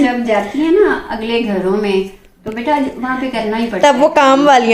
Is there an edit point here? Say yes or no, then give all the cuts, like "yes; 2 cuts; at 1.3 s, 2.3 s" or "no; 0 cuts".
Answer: no; 0 cuts